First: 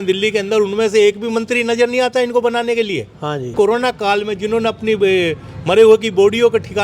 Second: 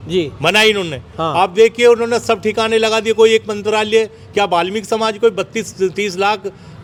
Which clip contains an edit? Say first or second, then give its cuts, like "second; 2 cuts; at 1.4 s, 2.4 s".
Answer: first; 1 cut; at 3.5 s